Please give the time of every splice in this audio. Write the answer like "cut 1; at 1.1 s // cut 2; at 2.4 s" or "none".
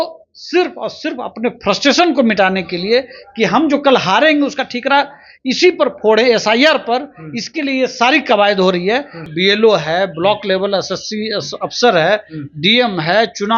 cut 1; at 9.2 s